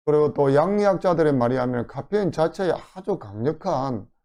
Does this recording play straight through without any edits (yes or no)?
yes